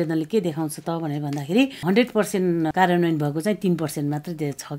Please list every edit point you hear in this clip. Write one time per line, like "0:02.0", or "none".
0:01.8
0:02.7